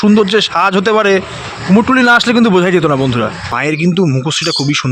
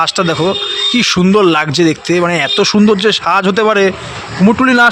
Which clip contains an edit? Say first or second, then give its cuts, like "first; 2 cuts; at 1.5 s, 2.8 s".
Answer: first; 1 cut; at 3.4 s